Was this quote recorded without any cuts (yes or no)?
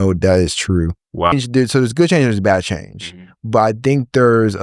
no